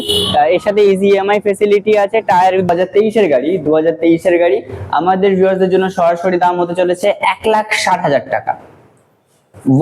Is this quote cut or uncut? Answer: cut